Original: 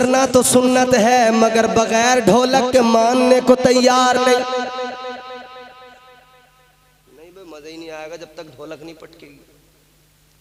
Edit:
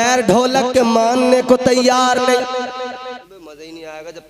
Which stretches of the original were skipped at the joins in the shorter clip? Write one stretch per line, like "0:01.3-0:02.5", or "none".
0:05.2-0:07.3